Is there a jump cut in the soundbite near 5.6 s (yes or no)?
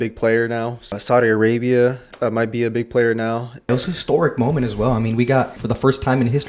yes